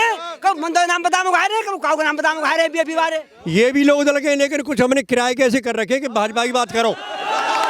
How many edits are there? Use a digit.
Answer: 1